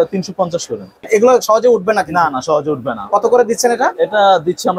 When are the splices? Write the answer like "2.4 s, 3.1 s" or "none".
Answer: 0.9 s